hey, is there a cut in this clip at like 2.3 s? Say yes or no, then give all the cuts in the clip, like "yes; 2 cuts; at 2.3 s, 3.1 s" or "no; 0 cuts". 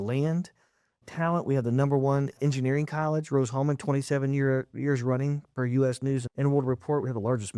yes; 3 cuts; at 1.0 s, 2.3 s, 6.3 s